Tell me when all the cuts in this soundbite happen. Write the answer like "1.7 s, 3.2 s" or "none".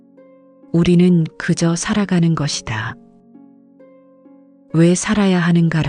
0.7 s, 2.9 s, 4.7 s